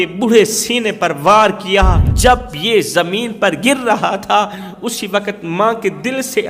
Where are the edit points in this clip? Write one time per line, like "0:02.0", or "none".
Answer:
0:02.1